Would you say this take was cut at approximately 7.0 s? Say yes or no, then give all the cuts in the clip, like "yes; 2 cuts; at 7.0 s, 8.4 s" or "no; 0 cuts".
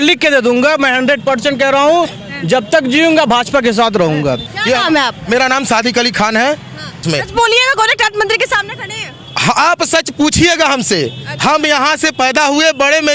yes; 2 cuts; at 4.5 s, 7.0 s